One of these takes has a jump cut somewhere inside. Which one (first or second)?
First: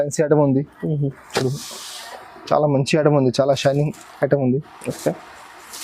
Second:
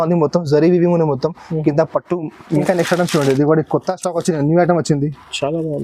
second